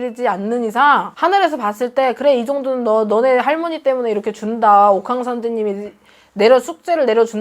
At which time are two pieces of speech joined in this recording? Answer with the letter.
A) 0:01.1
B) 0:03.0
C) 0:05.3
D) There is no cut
A